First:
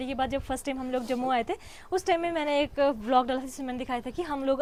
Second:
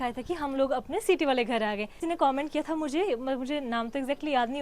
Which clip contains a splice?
second; 1 cut; at 2.0 s

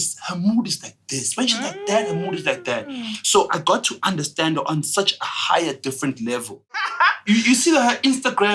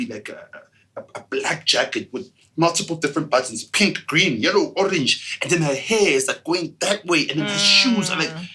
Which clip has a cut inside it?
first; 1 cut; at 6.9 s

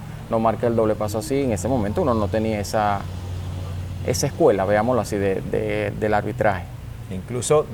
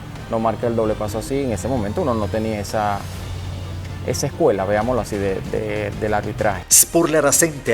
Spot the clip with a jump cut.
second; 1 cut; at 6.7 s

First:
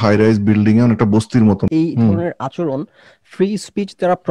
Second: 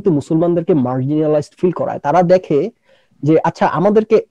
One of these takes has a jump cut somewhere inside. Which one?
first; 1 cut; at 1.7 s

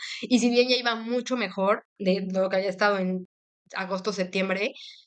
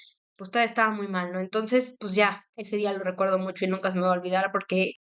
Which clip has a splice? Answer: second; 1 cut; at 2.5 s

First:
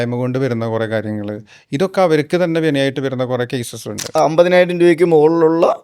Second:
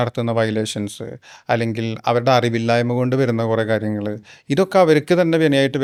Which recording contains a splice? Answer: first; 1 cut; at 4.0 s

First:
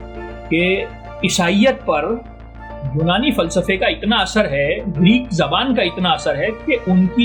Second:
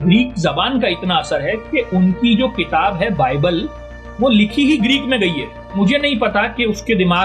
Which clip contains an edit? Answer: second; 1 cut; at 5.8 s

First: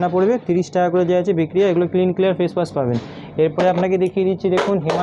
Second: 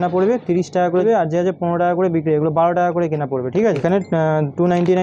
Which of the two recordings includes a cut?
second; 2 cuts; at 1.0 s, 3.8 s

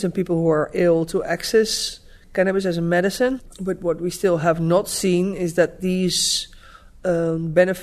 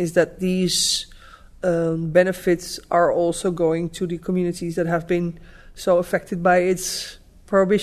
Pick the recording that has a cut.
first; 1 cut; at 3.5 s

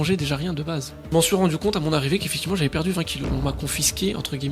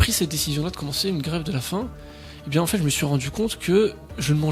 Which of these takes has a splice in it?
first; 2 cuts; at 1.0 s, 3.3 s

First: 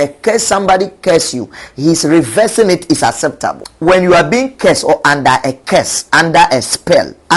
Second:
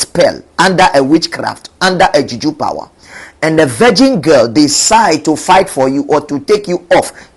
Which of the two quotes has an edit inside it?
first; 1 cut; at 3.7 s

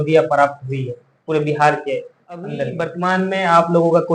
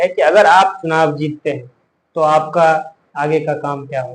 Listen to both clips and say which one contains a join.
first; 1 cut; at 2.8 s

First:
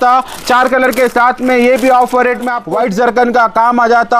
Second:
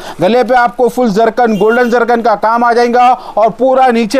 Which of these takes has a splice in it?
first; 1 cut; at 2.6 s

